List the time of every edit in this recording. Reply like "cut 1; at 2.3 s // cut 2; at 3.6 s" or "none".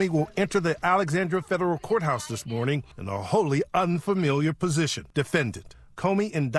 cut 1; at 2.9 s // cut 2; at 5.0 s

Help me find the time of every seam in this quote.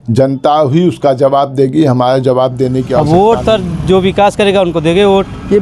cut 1; at 3.0 s

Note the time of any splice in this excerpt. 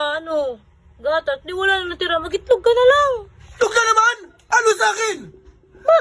cut 1; at 4.3 s

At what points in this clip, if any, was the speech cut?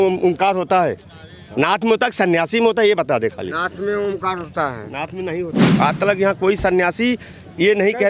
cut 1; at 5.6 s

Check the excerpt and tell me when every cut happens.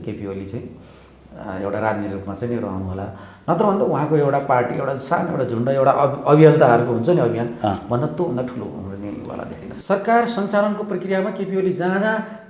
cut 1; at 9.7 s

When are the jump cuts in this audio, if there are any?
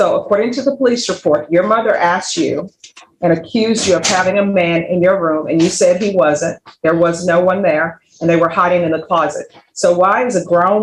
none

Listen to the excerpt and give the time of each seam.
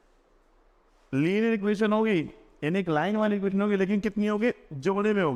none

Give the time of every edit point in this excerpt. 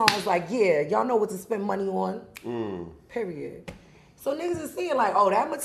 none

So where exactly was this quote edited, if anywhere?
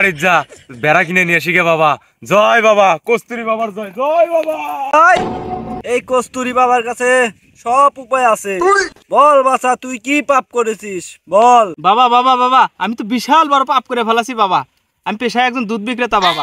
cut 1; at 4.9 s

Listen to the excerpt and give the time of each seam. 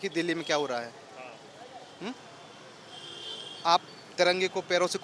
none

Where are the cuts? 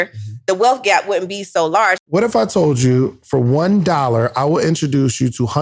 cut 1; at 2.0 s

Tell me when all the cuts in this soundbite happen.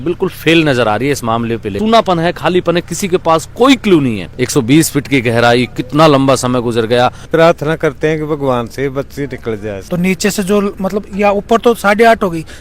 cut 1; at 1.7 s // cut 2; at 4.2 s // cut 3; at 7.3 s // cut 4; at 9.8 s

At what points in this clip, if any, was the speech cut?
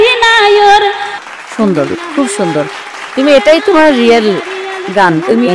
cut 1; at 1.1 s

